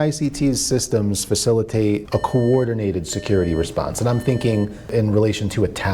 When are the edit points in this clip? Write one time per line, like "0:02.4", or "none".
0:02.0
0:04.9